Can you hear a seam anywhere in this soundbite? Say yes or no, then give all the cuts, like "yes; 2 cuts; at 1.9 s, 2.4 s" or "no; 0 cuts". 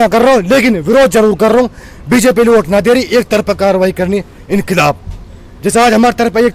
no; 0 cuts